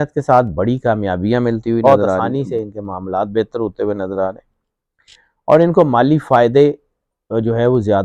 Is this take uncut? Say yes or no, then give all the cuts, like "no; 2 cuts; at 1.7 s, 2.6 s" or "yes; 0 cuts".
no; 1 cut; at 1.8 s